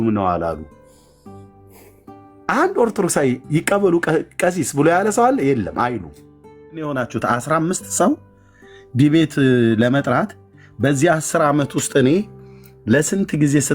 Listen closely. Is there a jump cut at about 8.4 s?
no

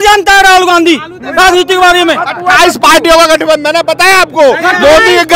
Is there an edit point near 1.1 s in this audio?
no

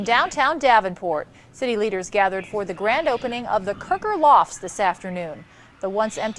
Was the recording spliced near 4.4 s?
no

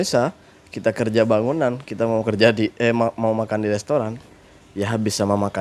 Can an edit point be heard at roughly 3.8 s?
no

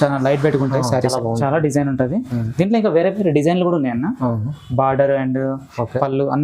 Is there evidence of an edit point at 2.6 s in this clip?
no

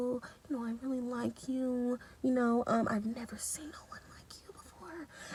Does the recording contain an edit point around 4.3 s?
no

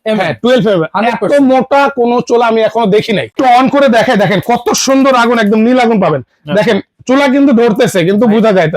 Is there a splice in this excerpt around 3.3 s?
yes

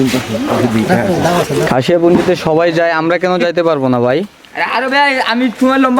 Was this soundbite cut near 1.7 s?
yes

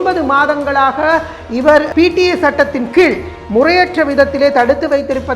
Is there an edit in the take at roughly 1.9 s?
yes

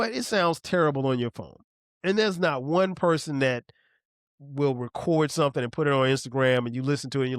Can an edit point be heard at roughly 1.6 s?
no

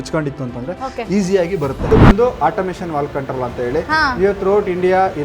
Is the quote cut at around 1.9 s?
yes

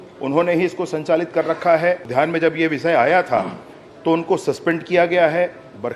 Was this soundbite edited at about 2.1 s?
yes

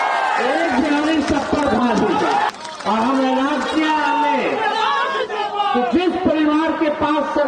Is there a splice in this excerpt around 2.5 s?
yes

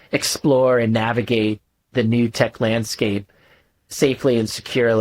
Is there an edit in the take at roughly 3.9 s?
yes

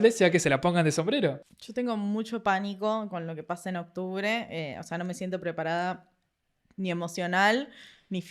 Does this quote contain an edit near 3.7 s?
no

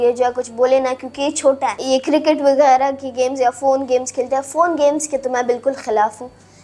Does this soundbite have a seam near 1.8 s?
yes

